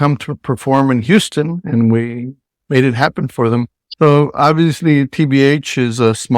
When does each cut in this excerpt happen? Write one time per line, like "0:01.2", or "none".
0:03.8